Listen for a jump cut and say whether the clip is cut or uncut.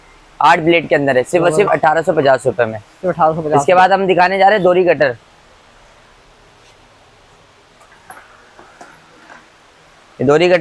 uncut